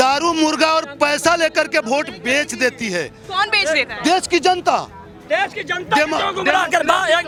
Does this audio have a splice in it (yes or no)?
no